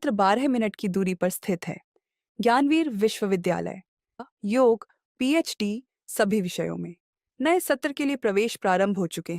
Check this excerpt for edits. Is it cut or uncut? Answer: cut